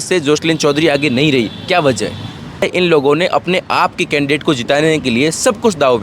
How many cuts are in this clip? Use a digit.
1